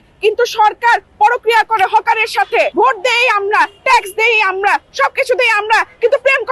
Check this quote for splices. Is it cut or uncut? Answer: cut